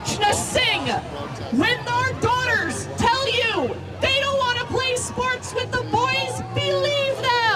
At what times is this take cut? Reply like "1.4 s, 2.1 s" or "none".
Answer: none

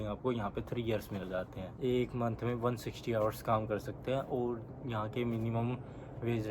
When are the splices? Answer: 1.6 s

